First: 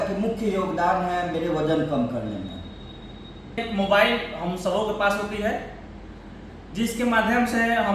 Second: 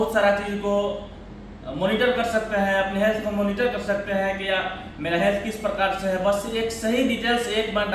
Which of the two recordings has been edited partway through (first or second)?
first